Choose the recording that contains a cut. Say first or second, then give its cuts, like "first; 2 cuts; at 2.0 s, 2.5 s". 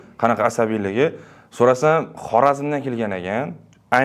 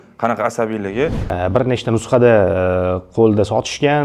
second; 1 cut; at 1.2 s